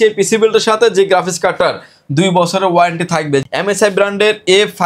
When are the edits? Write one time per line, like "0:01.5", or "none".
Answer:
0:03.4